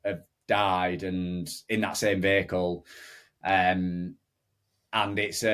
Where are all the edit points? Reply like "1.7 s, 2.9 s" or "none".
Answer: none

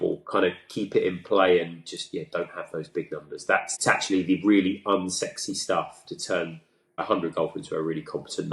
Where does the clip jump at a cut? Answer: 7.0 s

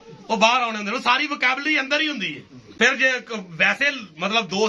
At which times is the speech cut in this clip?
none

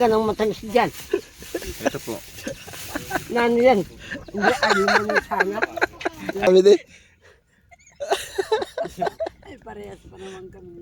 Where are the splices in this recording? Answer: 6.5 s

